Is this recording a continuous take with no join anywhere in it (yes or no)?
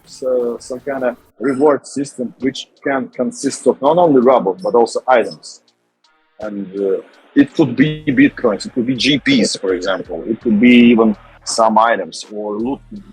yes